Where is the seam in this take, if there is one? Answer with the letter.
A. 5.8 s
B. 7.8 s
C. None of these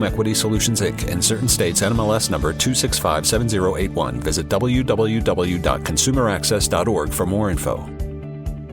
B